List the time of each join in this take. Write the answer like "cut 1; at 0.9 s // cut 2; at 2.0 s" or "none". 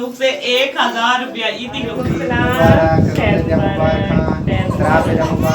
cut 1; at 1.9 s